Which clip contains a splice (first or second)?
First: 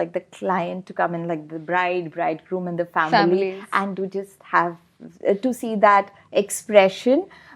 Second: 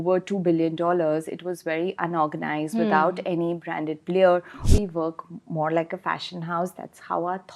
second